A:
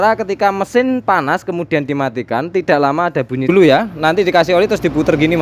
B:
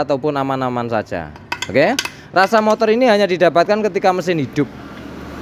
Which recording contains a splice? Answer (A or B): A